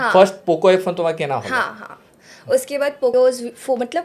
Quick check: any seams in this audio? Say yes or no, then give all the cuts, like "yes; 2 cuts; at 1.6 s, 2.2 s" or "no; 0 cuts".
yes; 1 cut; at 3.1 s